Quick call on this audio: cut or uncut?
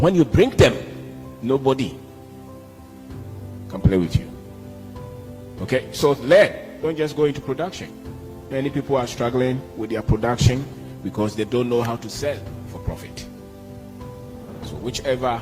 cut